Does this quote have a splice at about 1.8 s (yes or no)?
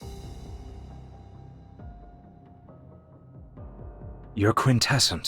no